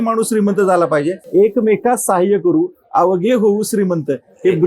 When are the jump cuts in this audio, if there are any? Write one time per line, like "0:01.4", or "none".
0:01.2